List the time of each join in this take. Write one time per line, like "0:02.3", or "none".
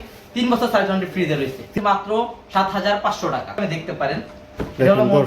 0:01.6
0:03.6